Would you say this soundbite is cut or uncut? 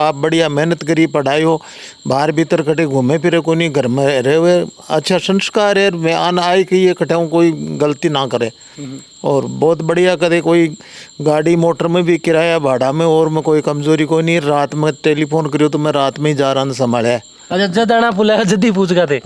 uncut